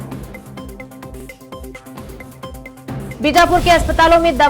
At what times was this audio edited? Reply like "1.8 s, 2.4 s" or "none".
1.6 s, 3.2 s